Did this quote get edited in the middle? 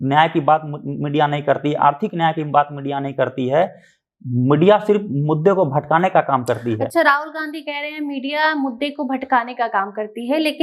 no; 0 cuts

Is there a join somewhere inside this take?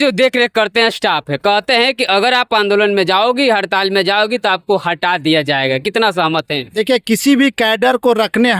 no; 0 cuts

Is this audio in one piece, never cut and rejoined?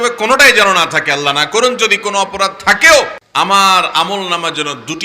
no; 1 cut; at 3.2 s

